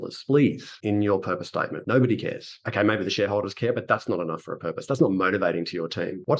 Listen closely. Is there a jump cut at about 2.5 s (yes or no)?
no